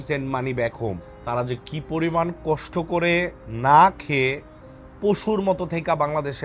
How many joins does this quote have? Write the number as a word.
one